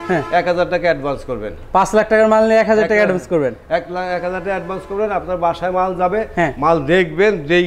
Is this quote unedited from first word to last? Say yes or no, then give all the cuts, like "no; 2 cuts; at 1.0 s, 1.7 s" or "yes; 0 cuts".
yes; 0 cuts